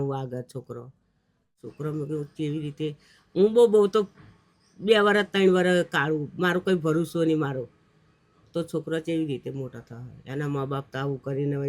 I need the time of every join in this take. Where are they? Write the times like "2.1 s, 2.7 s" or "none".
1.6 s